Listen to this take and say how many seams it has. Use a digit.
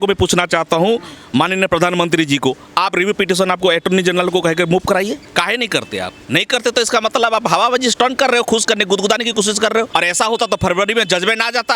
3